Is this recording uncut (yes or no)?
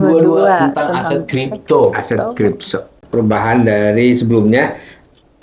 no